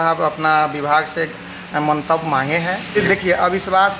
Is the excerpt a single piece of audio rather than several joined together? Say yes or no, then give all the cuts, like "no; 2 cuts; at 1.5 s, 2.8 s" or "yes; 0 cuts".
no; 1 cut; at 2.9 s